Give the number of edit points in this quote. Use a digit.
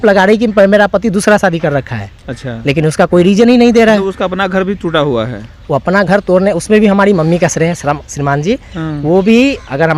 0